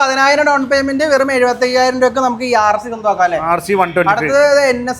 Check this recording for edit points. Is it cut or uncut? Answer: uncut